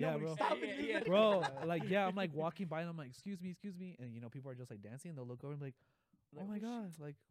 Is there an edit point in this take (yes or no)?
yes